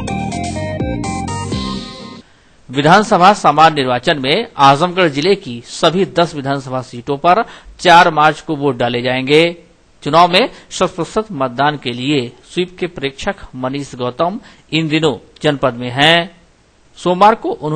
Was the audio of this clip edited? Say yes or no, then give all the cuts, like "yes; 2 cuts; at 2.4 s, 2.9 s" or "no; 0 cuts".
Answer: yes; 1 cut; at 1.0 s